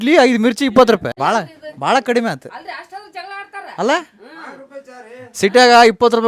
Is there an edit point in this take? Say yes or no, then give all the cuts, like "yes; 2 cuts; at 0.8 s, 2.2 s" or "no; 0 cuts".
yes; 1 cut; at 1.1 s